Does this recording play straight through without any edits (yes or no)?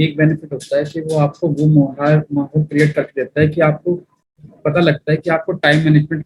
yes